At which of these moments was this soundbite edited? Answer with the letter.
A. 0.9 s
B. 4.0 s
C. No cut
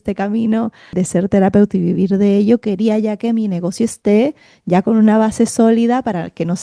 A